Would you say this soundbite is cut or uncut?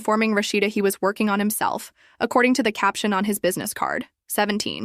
uncut